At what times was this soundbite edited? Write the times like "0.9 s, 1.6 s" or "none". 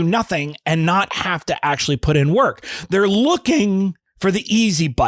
4.1 s